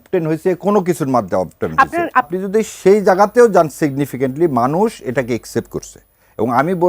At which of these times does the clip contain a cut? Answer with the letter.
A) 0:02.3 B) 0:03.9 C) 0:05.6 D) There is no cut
A